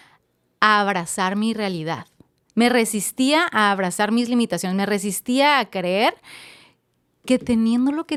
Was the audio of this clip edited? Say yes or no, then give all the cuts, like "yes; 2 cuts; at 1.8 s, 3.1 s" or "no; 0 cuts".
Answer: no; 0 cuts